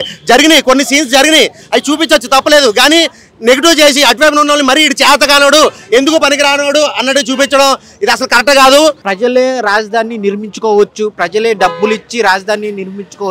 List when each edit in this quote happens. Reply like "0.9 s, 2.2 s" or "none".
9.1 s

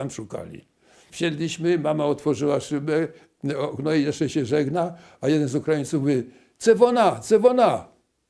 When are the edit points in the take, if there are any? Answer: 1.0 s

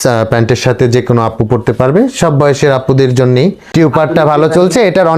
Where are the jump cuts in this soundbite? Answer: 3.7 s

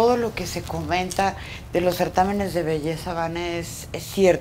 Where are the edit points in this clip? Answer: none

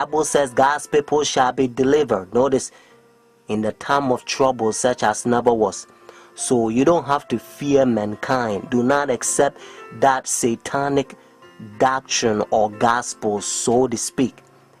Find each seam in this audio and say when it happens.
11.2 s

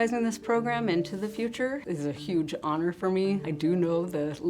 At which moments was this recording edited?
1.8 s, 3.5 s

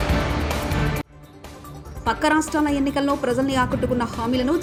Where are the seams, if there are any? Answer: none

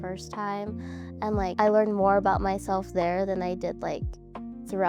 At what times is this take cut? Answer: none

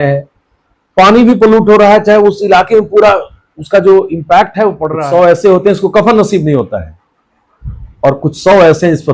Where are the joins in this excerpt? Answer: 4.9 s

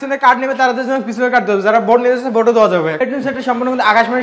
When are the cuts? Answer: 3.0 s

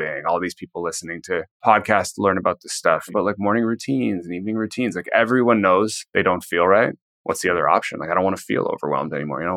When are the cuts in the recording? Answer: 1.5 s, 3.1 s, 6.0 s, 7.1 s

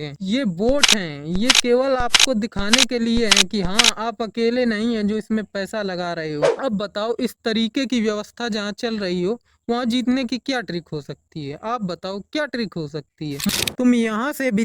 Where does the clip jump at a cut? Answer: 13.5 s

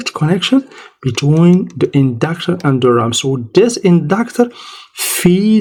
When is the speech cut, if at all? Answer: none

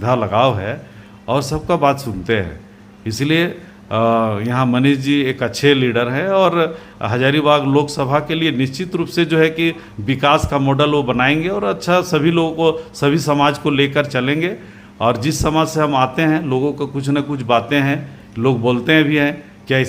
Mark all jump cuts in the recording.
none

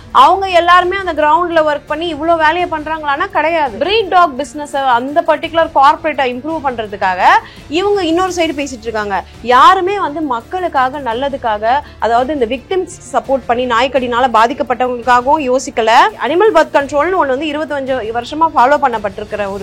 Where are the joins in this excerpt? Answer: 3.7 s, 16.2 s

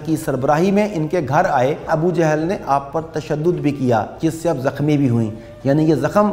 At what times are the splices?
1.9 s

